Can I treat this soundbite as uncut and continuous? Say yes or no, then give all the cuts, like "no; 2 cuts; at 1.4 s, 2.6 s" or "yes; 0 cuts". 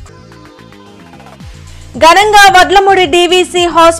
yes; 0 cuts